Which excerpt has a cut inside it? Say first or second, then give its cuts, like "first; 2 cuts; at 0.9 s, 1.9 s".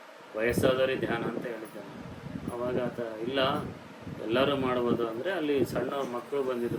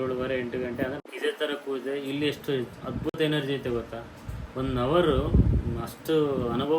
second; 1 cut; at 1.0 s